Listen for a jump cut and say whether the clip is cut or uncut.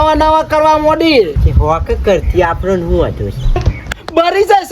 cut